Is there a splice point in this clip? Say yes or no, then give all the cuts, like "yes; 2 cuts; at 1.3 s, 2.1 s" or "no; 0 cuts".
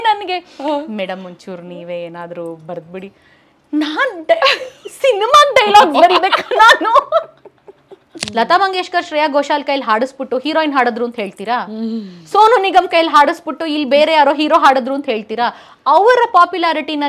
yes; 1 cut; at 8.2 s